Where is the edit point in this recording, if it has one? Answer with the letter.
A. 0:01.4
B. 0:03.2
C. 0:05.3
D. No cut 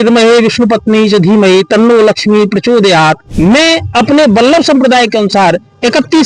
B